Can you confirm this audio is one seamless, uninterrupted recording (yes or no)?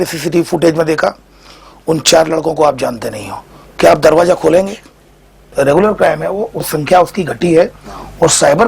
no